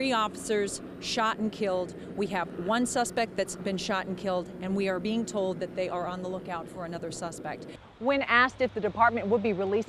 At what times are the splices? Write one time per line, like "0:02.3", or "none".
0:07.8